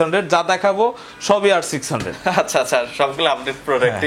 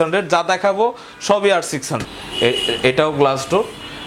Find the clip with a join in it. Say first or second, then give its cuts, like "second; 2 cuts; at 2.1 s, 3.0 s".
second; 1 cut; at 2.1 s